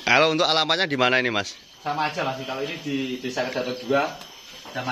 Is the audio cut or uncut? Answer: uncut